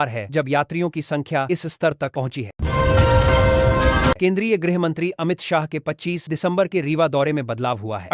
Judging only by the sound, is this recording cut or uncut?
cut